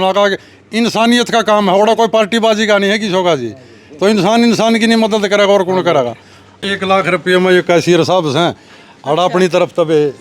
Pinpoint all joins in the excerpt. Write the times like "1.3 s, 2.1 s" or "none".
6.6 s